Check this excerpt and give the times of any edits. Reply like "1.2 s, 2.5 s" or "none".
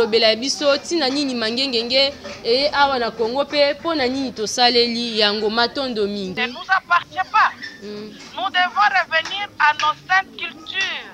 6.4 s